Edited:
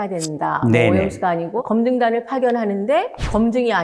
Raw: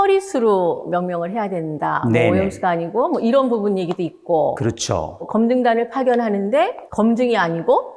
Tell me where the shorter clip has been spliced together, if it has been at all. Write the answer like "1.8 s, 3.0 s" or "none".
1.5 s